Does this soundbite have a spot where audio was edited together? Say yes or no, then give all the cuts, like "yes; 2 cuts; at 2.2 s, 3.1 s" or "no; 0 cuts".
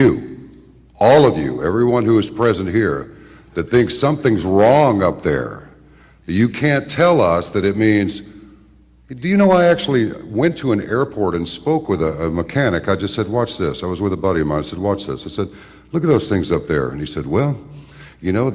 no; 0 cuts